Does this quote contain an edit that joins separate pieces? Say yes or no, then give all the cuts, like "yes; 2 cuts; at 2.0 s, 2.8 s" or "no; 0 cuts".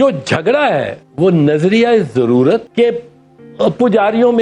yes; 2 cuts; at 1.0 s, 2.7 s